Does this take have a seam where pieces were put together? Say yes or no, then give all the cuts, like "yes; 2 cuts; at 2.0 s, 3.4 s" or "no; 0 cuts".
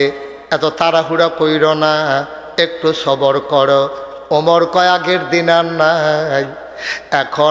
no; 0 cuts